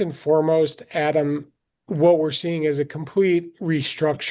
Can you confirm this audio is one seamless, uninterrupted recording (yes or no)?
yes